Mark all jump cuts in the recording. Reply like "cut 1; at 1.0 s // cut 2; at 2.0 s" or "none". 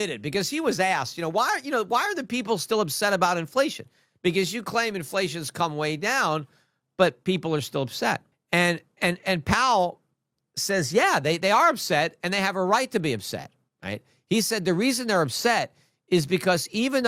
cut 1; at 8.3 s